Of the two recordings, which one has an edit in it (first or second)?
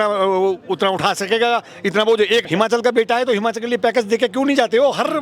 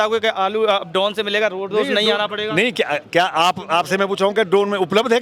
first